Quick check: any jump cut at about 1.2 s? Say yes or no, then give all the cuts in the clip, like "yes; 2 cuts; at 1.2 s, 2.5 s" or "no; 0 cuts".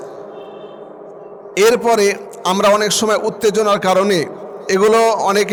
no; 0 cuts